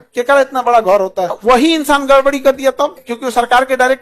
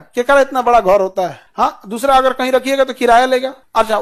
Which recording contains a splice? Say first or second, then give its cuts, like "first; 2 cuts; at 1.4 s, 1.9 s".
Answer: first; 2 cuts; at 1.4 s, 3.0 s